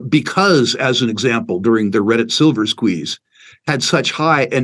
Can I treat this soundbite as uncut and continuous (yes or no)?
yes